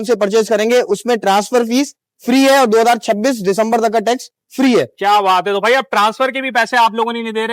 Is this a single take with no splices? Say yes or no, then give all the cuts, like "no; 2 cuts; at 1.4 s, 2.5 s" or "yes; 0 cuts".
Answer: yes; 0 cuts